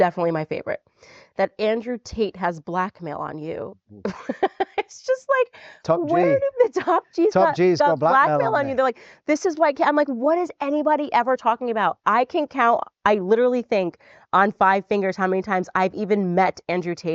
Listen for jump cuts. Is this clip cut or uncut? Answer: uncut